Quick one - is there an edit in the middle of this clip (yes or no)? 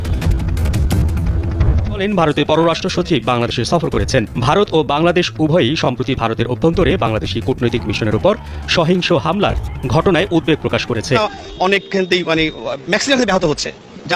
yes